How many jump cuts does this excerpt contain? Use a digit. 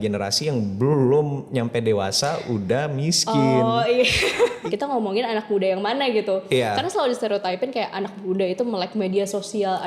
1